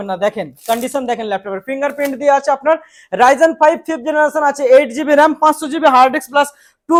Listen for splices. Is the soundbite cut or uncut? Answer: uncut